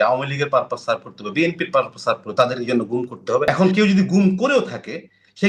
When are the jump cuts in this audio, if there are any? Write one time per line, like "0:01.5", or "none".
0:03.5